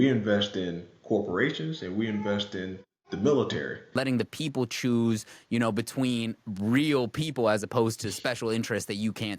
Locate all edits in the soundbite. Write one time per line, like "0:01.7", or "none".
0:04.0